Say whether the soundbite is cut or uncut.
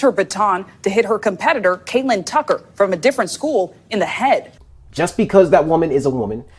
cut